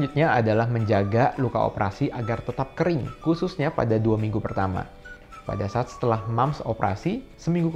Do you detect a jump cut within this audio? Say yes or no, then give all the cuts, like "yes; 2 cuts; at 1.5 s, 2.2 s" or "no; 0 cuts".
no; 0 cuts